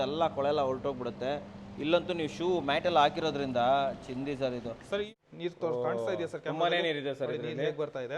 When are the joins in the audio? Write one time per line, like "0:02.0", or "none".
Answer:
0:05.1

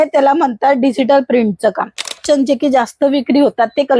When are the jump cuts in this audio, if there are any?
0:02.2

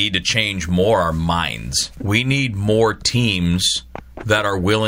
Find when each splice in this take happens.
0:02.0

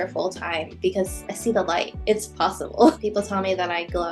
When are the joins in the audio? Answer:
0:01.2
0:03.0

